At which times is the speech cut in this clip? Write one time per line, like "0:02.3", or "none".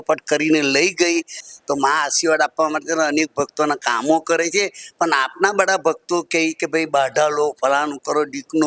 0:01.4

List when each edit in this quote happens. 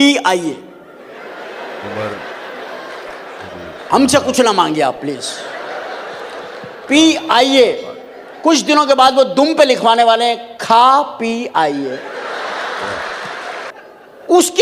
0:13.7

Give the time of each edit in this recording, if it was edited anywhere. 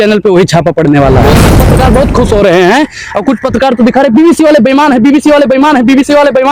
0:01.6

